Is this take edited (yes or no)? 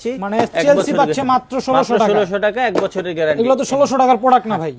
no